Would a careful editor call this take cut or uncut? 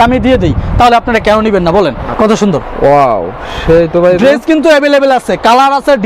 cut